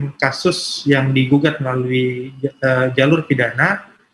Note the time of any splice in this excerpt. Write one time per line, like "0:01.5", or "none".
none